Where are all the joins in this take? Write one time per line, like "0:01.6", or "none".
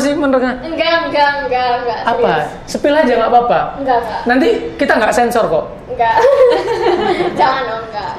none